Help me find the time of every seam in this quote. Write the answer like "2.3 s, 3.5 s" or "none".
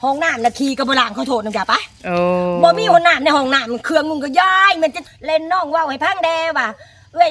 5.0 s